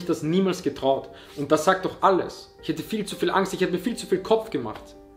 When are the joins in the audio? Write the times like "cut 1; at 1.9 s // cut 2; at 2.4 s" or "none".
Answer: cut 1; at 2.5 s